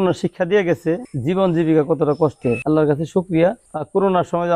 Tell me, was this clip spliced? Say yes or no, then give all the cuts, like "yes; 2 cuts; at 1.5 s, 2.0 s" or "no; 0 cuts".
yes; 3 cuts; at 1.1 s, 2.6 s, 3.6 s